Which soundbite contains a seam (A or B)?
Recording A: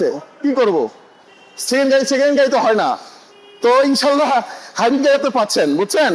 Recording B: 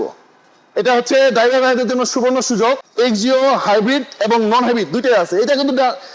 B